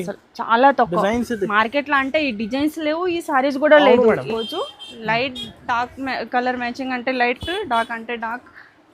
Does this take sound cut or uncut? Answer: cut